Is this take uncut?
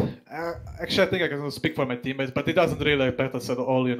yes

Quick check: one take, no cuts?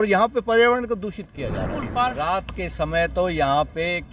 no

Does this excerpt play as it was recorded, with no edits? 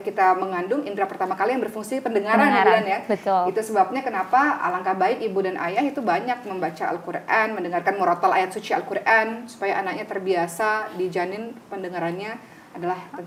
yes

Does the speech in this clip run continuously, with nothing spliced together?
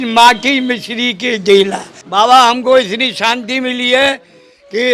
no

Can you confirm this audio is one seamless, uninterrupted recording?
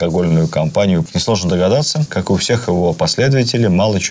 no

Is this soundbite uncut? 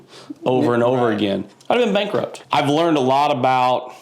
no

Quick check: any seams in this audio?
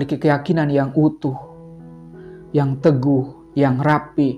no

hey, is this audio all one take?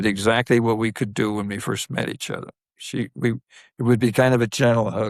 yes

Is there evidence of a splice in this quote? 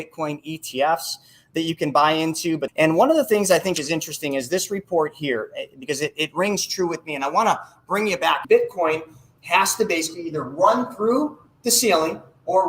yes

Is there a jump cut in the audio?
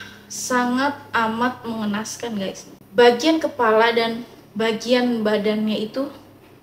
yes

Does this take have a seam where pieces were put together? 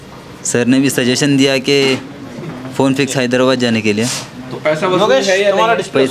no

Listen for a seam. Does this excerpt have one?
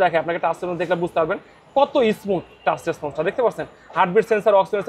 no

